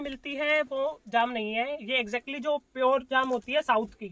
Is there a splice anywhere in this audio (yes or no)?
no